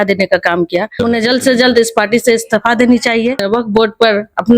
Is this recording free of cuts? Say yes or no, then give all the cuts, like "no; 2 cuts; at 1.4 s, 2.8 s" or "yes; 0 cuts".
no; 2 cuts; at 0.9 s, 3.5 s